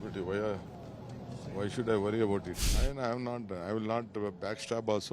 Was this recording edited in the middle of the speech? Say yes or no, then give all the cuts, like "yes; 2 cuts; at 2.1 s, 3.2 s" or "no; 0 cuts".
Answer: yes; 1 cut; at 2.7 s